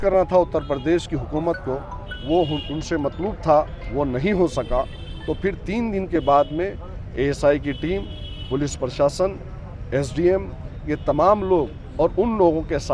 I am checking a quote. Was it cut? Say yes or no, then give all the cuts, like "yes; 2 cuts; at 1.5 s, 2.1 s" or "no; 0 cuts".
no; 0 cuts